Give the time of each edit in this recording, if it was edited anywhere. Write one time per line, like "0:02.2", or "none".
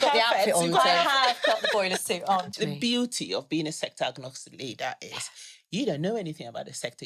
0:02.5